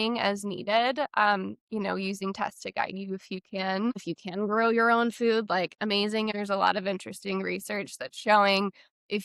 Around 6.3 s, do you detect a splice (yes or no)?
yes